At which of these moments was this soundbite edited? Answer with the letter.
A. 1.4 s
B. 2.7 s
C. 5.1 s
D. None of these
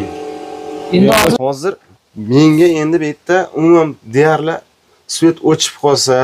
A